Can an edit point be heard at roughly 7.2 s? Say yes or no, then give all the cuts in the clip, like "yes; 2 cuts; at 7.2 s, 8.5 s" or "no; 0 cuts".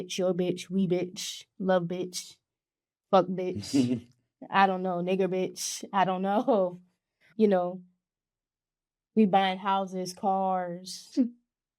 yes; 1 cut; at 7.2 s